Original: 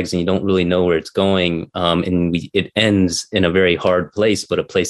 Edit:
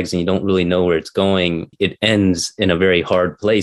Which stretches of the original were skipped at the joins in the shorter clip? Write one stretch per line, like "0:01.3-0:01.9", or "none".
0:01.7-0:02.5